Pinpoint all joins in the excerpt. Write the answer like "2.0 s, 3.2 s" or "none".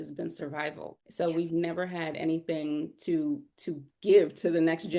none